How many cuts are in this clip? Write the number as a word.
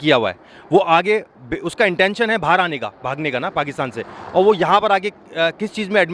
zero